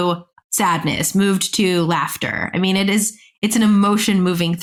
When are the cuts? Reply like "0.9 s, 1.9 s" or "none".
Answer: none